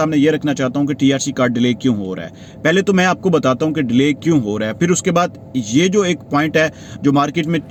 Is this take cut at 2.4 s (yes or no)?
no